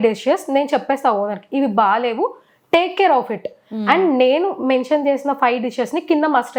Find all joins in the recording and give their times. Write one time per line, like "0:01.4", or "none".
none